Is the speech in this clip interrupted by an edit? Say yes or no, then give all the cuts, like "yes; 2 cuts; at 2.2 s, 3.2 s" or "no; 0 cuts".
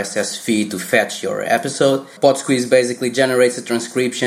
yes; 1 cut; at 2.1 s